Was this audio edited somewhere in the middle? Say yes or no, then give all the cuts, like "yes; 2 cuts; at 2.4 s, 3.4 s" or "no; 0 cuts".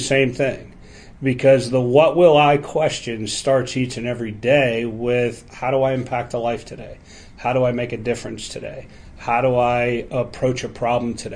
no; 0 cuts